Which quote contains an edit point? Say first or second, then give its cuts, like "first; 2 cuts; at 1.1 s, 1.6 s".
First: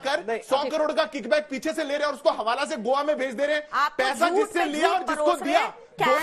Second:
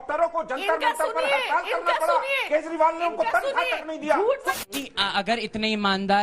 second; 1 cut; at 4.6 s